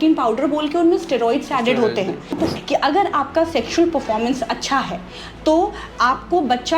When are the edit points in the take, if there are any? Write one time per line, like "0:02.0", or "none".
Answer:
0:02.4